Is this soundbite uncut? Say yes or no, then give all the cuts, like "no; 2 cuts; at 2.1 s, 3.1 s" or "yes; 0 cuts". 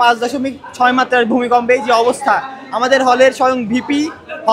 yes; 0 cuts